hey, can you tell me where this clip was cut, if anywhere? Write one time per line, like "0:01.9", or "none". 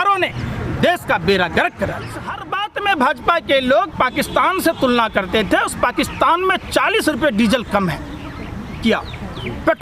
0:02.4